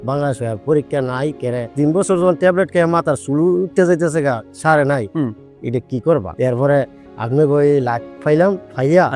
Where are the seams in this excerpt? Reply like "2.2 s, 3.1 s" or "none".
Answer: none